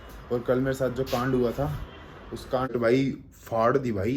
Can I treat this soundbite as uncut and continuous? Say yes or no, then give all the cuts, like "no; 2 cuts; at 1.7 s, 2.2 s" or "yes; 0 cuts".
no; 1 cut; at 2.7 s